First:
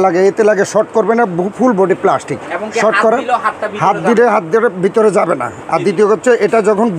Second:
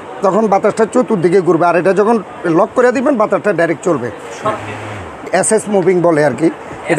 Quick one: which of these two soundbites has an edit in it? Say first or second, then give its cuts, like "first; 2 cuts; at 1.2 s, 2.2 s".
second; 1 cut; at 4.5 s